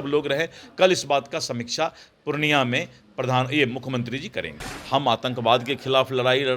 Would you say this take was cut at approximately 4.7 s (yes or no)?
yes